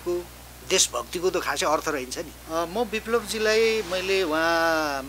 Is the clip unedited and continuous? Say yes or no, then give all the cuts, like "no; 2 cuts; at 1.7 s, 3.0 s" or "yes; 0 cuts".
no; 1 cut; at 2.4 s